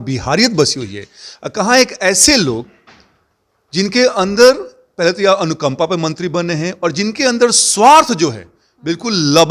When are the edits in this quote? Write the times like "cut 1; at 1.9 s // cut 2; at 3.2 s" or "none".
none

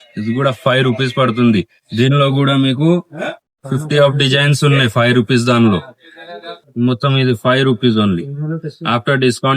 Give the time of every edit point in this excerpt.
cut 1; at 6.7 s

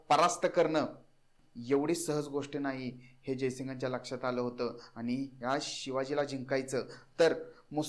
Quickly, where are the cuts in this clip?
none

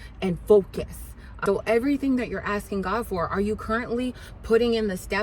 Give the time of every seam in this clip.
cut 1; at 1.3 s

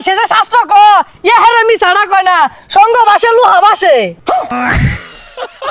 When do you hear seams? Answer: cut 1; at 4.5 s

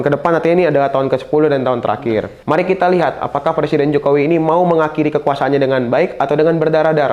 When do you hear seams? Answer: cut 1; at 2.3 s

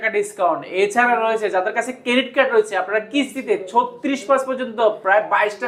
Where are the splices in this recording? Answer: none

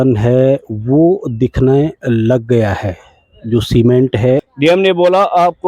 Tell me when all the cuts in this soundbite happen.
cut 1; at 4.5 s

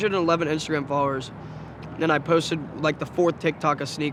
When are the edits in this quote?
none

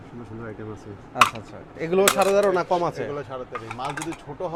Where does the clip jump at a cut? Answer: none

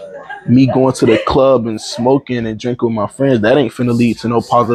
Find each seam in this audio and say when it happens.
none

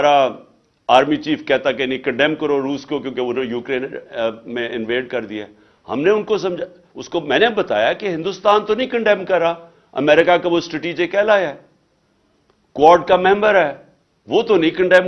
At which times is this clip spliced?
none

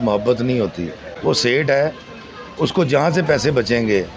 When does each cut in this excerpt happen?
cut 1; at 1.1 s

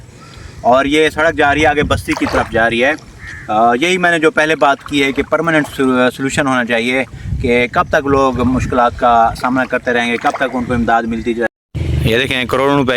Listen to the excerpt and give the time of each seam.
cut 1; at 11.5 s

